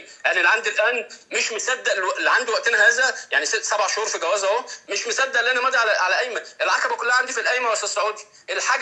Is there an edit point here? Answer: no; 0 cuts

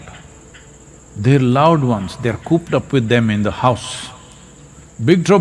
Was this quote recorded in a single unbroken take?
yes; 0 cuts

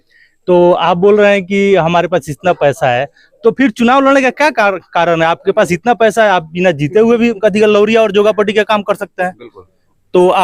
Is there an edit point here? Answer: no; 0 cuts

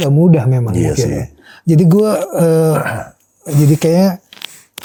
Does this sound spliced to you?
no; 0 cuts

